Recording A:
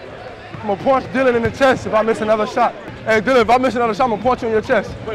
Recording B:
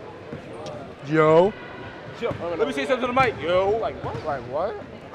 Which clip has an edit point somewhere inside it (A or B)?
A